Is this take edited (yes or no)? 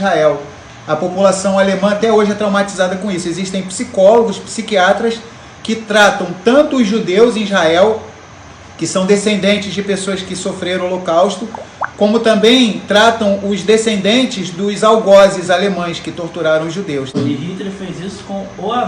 yes